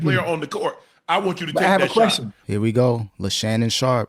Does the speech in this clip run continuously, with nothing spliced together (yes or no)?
no